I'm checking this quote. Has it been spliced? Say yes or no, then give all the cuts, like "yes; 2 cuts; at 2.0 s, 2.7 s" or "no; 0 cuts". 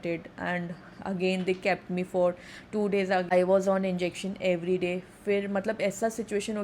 yes; 1 cut; at 3.2 s